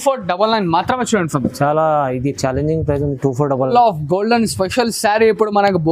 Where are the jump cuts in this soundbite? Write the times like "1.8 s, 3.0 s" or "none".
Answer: 3.7 s